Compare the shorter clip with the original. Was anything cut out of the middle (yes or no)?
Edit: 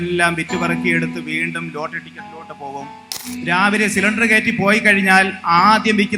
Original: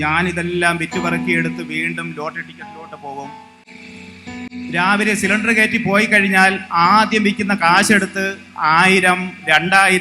yes